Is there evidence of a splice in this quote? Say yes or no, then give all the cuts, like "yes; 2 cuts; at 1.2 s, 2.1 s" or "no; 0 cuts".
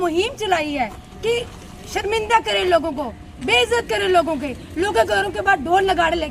no; 0 cuts